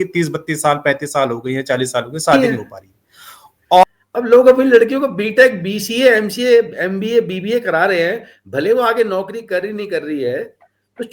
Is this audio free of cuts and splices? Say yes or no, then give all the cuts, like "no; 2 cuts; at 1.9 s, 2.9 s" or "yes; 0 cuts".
no; 1 cut; at 3.8 s